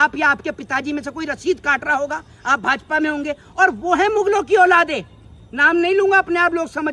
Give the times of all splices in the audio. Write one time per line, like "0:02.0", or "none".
none